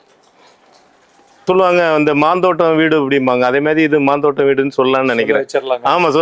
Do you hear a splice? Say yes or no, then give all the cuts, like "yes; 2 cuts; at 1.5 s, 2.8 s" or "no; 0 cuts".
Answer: yes; 1 cut; at 1.4 s